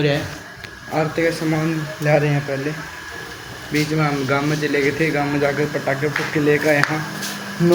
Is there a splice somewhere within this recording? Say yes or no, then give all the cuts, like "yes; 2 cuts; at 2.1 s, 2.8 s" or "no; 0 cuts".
no; 0 cuts